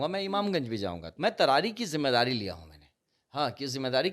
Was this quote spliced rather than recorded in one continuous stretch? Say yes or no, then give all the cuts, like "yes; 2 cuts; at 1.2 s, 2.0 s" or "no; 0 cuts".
yes; 1 cut; at 1.0 s